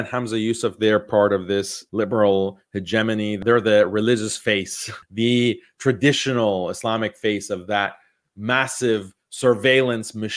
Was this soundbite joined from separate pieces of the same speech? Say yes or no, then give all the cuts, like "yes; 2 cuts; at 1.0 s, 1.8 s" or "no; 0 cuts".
yes; 3 cuts; at 1.8 s, 3.4 s, 5.0 s